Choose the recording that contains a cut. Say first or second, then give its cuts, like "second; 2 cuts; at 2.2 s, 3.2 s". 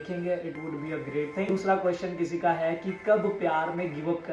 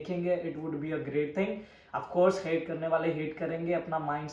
first; 1 cut; at 1.6 s